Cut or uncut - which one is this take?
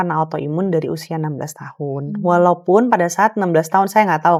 uncut